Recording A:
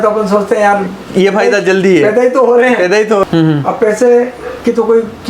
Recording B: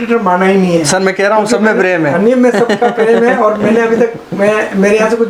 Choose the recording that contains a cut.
A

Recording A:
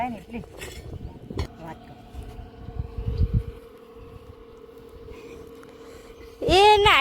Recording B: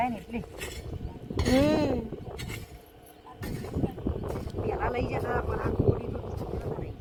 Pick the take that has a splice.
A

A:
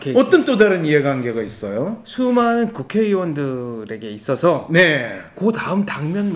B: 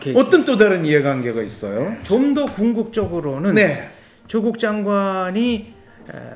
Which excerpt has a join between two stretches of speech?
B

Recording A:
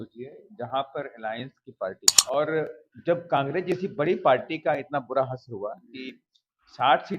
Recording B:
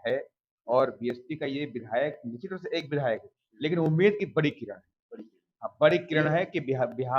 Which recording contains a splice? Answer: A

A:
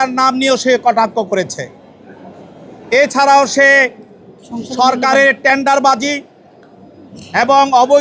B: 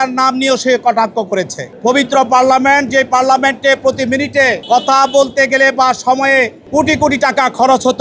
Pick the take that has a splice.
B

